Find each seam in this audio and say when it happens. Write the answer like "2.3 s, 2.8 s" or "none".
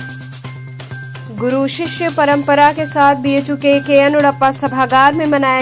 1.2 s